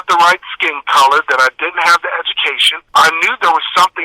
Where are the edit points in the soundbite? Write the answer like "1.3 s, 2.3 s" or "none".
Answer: 2.9 s